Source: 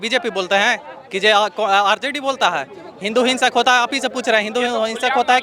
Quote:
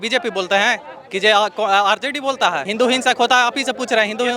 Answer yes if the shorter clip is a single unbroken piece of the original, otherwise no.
no